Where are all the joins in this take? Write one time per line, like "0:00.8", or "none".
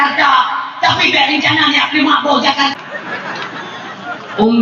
0:02.7